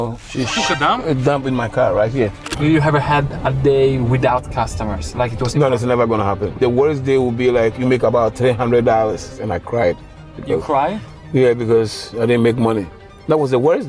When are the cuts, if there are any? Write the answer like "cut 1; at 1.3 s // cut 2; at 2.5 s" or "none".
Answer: cut 1; at 2.5 s // cut 2; at 6.6 s // cut 3; at 9.3 s